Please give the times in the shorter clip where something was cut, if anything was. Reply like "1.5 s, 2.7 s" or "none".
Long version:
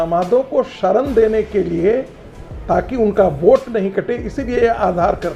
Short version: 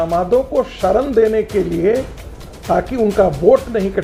none